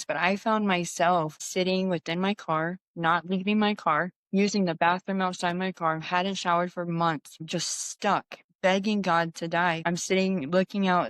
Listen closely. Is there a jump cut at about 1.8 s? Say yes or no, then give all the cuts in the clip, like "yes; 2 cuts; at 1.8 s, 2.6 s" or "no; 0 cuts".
no; 1 cut; at 9.8 s